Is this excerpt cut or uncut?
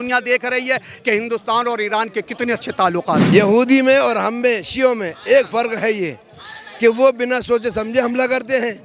cut